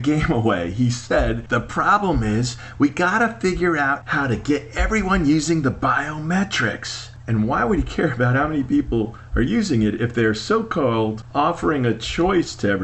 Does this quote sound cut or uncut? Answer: cut